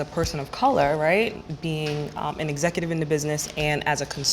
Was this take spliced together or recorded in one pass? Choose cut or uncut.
cut